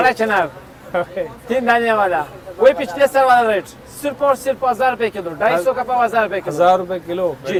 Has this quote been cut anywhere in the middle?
no; 0 cuts

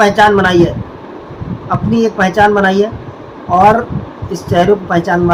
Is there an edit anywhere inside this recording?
no; 0 cuts

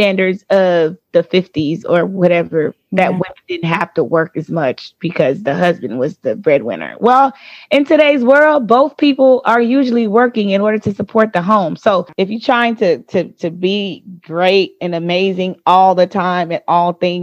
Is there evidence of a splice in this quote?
no; 0 cuts

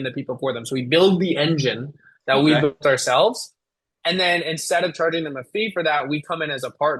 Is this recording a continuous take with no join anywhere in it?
yes; 0 cuts

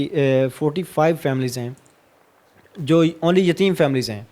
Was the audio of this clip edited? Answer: no; 0 cuts

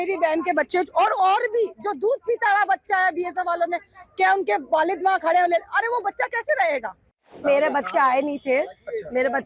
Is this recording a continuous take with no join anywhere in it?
no; 1 cut; at 7.4 s

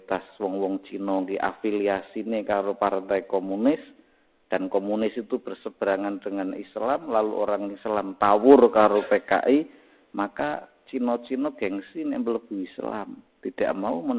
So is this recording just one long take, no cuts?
yes; 0 cuts

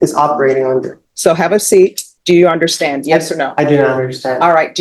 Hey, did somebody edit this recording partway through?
yes; 2 cuts; at 1.0 s, 2.1 s

